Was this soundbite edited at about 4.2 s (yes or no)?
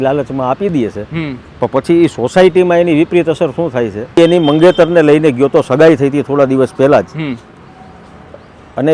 yes